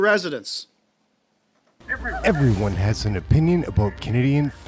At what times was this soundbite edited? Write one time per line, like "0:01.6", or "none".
0:01.9